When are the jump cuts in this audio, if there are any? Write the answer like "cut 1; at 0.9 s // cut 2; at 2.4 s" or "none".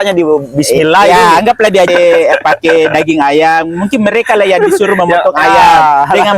cut 1; at 1.9 s